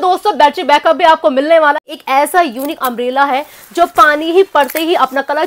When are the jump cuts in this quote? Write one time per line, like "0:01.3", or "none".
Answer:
0:01.7